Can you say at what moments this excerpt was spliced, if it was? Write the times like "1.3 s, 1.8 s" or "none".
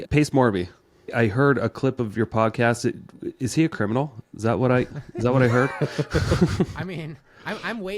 1.1 s